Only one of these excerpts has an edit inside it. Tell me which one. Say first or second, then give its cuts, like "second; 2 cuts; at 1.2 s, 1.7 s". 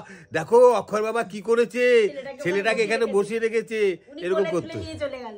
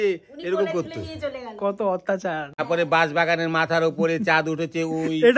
second; 1 cut; at 2.5 s